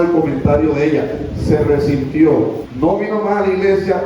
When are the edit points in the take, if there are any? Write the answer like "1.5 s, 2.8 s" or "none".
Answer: 2.6 s